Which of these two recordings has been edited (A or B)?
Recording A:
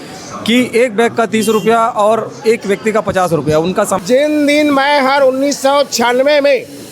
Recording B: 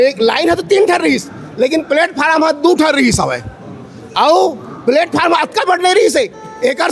A